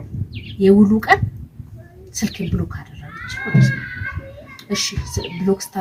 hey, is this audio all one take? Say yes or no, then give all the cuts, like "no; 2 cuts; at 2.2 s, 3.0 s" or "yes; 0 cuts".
yes; 0 cuts